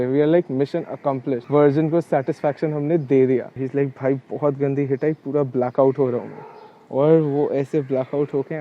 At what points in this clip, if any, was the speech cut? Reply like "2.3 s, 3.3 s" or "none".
1.4 s, 3.6 s